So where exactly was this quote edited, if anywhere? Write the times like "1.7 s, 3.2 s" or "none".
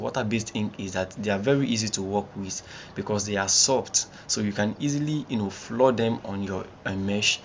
none